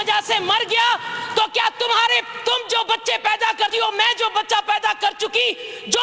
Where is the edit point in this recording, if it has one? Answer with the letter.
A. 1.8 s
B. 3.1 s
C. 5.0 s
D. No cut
D